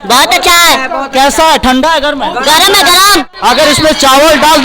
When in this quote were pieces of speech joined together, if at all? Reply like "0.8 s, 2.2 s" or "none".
3.3 s